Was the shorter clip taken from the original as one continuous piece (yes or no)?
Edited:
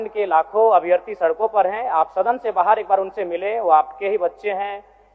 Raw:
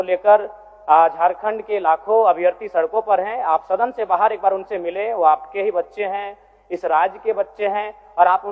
yes